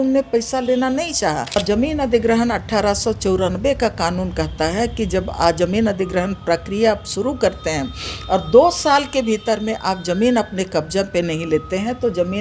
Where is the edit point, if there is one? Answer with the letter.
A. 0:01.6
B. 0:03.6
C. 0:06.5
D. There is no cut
A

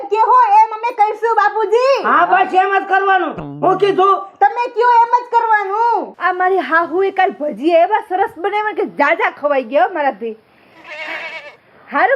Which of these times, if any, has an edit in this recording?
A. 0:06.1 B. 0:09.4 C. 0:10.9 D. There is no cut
A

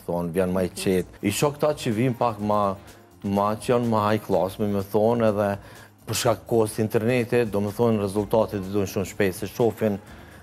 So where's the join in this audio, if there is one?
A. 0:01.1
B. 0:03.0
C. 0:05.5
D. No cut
A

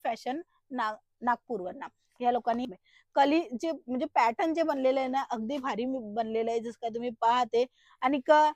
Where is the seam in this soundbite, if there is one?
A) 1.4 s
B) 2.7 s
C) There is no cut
B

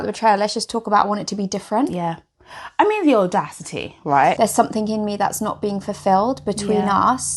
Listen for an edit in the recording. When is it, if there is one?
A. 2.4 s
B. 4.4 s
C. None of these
B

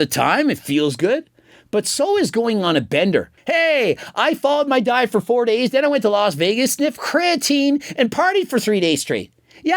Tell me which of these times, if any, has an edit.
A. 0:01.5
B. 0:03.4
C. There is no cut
B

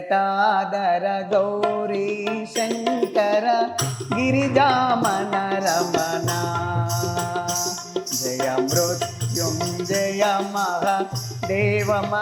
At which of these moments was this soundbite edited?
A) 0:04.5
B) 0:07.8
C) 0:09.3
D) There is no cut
D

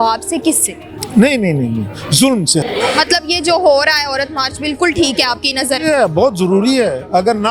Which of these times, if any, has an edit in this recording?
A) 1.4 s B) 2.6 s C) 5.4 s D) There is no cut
B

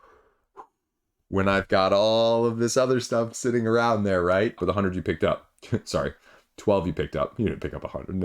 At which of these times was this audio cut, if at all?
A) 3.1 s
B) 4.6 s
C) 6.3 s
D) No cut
B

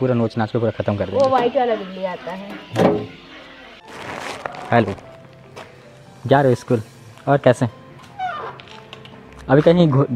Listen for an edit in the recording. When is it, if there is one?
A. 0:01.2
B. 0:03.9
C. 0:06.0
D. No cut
B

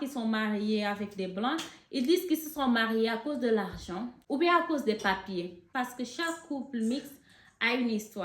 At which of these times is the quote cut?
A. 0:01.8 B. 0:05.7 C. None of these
B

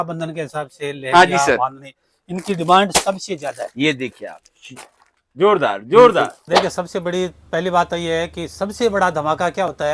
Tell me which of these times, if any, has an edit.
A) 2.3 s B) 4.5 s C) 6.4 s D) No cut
C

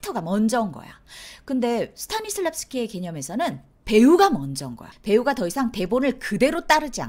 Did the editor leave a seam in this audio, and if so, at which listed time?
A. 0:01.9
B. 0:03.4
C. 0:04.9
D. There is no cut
C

